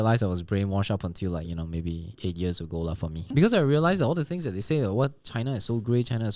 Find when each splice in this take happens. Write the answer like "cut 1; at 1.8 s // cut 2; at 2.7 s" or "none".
cut 1; at 3.3 s